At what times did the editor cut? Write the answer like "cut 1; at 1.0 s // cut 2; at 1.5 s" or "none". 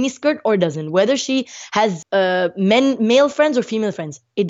cut 1; at 2.0 s